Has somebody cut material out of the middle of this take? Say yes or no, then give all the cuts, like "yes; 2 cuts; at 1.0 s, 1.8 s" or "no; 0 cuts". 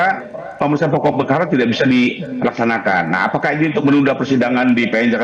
no; 0 cuts